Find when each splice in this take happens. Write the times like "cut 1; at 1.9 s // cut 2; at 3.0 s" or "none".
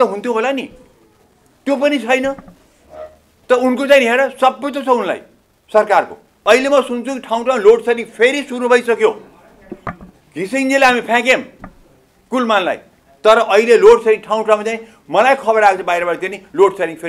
cut 1; at 6.3 s